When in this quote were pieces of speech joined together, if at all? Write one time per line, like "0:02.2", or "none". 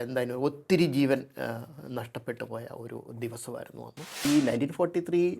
0:04.2